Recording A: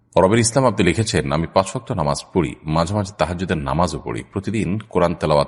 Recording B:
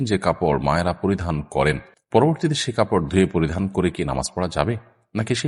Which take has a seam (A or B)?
B